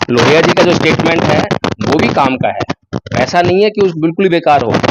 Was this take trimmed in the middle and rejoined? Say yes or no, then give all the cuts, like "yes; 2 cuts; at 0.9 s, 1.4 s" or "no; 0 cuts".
no; 0 cuts